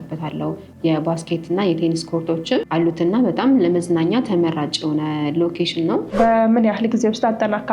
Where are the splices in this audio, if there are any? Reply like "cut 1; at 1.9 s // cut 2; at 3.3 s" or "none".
cut 1; at 2.7 s // cut 2; at 6.1 s